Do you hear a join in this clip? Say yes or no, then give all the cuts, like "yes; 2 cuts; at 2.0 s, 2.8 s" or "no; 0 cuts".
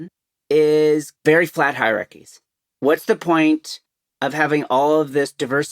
yes; 1 cut; at 1.1 s